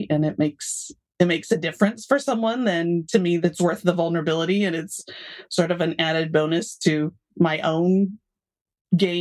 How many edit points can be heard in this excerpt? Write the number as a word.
two